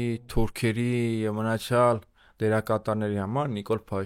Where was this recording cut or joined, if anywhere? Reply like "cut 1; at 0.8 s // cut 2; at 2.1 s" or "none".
none